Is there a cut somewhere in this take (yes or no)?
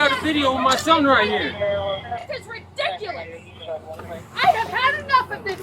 yes